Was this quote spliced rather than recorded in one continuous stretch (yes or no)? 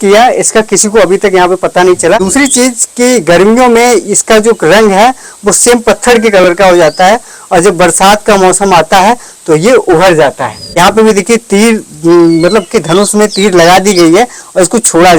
yes